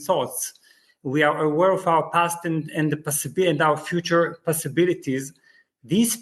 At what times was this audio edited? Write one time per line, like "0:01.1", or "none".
none